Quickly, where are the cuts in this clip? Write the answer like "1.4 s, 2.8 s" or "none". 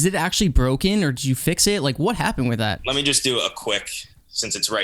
2.8 s